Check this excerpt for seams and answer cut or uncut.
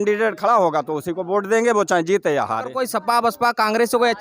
cut